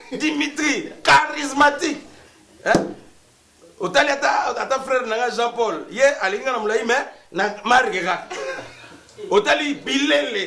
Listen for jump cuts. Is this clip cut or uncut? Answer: uncut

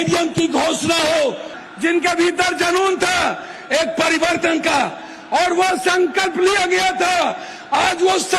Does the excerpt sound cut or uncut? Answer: cut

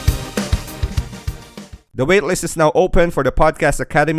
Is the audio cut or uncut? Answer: cut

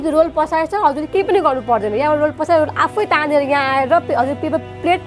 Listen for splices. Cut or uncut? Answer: uncut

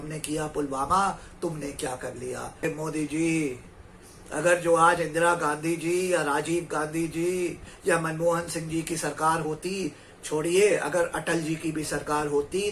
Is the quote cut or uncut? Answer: cut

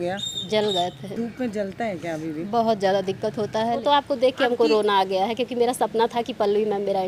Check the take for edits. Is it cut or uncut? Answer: cut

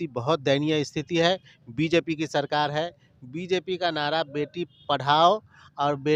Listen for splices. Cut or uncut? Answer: uncut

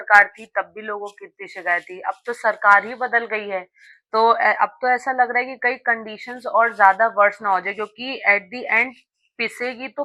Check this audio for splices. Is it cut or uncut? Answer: uncut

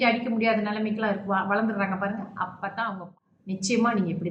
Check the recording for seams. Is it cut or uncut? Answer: cut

